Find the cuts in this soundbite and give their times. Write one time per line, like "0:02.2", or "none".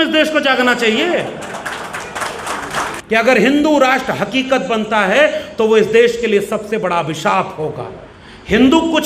0:03.0